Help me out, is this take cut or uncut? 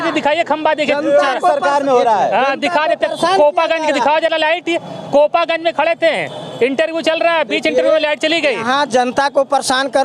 uncut